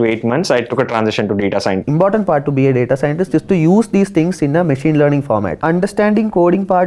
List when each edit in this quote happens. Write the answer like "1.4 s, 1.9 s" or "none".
1.8 s, 5.5 s